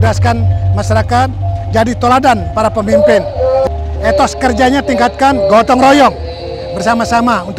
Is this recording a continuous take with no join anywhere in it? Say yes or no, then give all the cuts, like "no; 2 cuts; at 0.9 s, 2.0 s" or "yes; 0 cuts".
yes; 0 cuts